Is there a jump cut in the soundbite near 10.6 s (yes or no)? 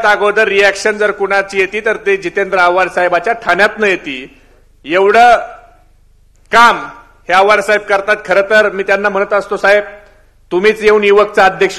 no